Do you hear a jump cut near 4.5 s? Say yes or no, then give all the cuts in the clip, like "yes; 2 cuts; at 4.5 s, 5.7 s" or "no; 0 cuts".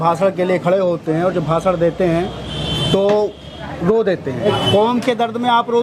yes; 1 cut; at 4.5 s